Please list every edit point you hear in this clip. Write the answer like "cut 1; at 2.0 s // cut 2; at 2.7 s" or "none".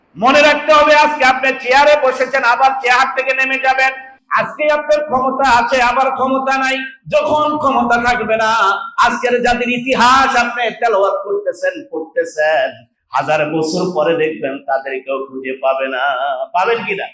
none

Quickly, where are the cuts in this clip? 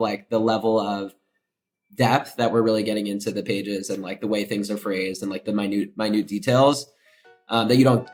none

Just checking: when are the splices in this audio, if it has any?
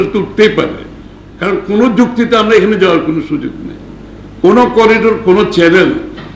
none

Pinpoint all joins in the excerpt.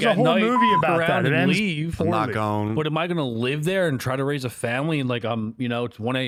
none

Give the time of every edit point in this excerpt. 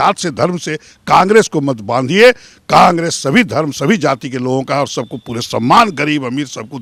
none

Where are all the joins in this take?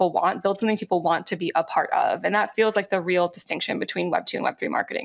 none

